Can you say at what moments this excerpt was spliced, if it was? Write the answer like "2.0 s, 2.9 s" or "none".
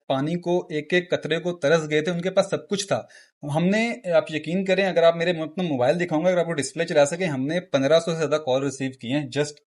none